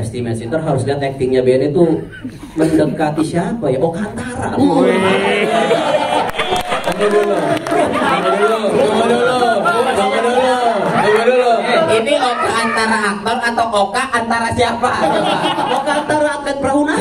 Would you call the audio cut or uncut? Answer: uncut